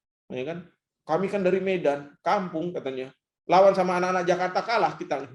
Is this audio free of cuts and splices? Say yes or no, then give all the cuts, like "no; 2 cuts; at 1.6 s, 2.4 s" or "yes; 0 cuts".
yes; 0 cuts